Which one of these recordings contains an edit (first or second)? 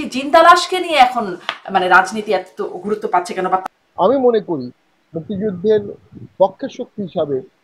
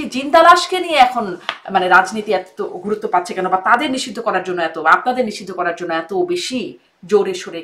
first